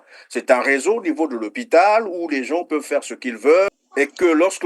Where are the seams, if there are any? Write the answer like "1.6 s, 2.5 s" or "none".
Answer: 3.7 s